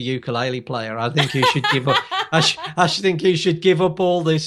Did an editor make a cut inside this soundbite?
no; 0 cuts

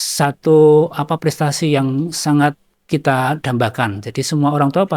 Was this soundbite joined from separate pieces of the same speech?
yes; 1 cut; at 2.7 s

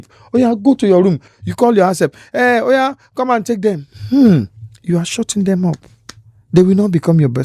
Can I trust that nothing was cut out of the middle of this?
yes; 0 cuts

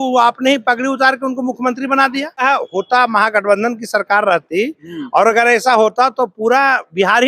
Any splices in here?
yes; 1 cut; at 2.4 s

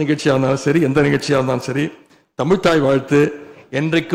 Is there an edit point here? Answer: no; 0 cuts

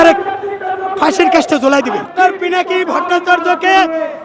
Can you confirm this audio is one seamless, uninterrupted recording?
no; 1 cut; at 2.1 s

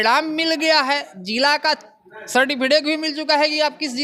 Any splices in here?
no; 0 cuts

